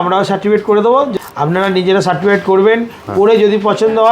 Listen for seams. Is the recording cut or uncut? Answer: cut